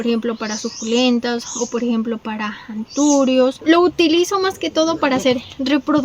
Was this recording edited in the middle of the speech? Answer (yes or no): yes